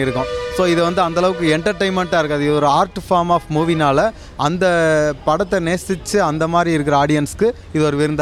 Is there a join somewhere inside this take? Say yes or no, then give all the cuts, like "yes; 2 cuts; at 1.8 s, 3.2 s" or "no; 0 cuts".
no; 0 cuts